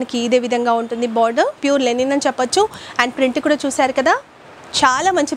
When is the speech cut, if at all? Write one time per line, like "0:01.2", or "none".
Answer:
0:01.6